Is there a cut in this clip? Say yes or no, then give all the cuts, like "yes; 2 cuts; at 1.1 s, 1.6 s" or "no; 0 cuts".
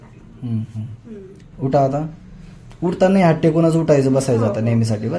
no; 0 cuts